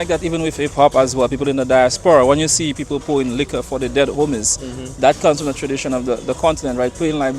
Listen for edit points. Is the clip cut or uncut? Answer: uncut